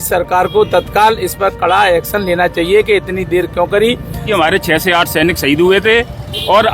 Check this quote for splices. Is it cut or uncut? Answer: cut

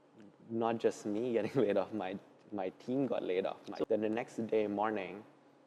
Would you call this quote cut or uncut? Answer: cut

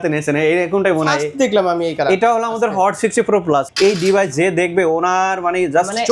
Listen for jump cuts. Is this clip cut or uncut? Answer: cut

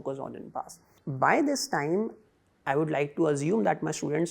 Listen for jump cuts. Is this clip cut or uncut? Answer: cut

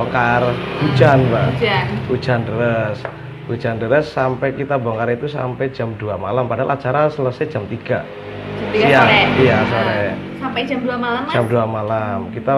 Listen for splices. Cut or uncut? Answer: uncut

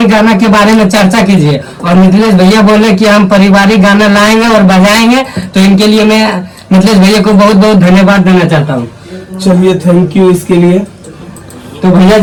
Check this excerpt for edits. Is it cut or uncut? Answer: uncut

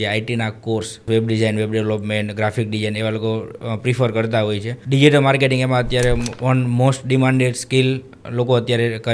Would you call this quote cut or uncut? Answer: cut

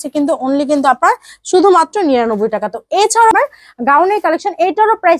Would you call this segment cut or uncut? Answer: cut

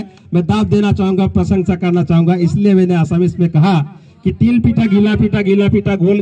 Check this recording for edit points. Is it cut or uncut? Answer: uncut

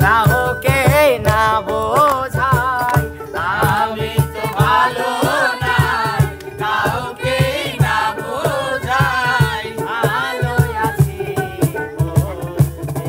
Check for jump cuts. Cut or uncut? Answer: uncut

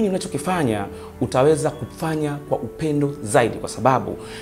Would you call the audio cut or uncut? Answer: uncut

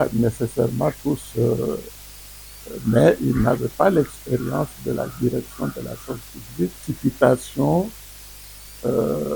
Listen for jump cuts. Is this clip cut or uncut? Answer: cut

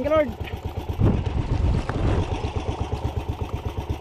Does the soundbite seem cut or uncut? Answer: cut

